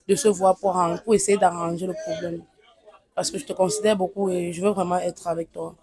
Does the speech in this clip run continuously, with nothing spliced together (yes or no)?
yes